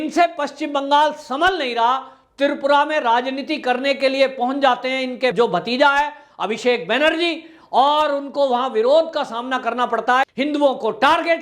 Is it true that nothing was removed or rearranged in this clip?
no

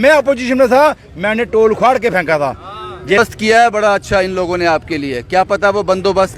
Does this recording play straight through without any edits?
no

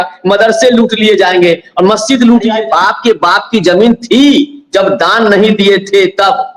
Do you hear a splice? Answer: yes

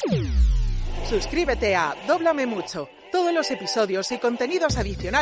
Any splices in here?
yes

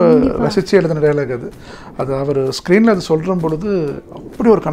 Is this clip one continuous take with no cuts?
yes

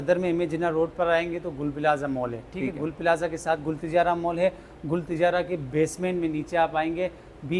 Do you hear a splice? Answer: no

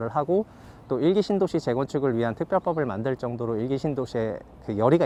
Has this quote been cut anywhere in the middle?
no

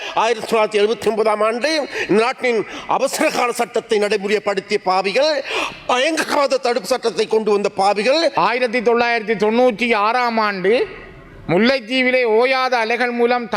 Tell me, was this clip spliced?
yes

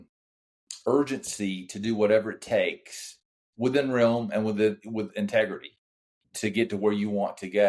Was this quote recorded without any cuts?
yes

